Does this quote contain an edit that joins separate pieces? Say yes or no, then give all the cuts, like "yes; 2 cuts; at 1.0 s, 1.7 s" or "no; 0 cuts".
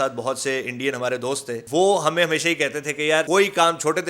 yes; 2 cuts; at 1.6 s, 3.3 s